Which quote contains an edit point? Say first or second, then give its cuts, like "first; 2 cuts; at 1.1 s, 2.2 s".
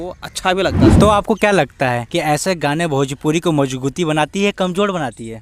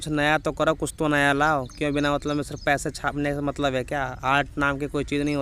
first; 2 cuts; at 0.9 s, 2.0 s